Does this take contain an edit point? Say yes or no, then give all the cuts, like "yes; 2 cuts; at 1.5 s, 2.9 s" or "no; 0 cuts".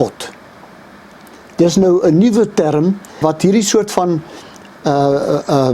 yes; 1 cut; at 3.2 s